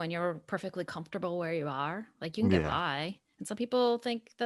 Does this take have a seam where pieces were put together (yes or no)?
no